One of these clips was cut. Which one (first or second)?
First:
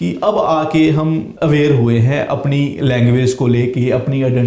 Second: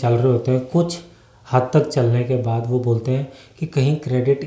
first